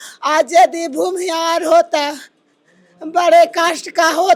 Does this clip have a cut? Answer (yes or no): no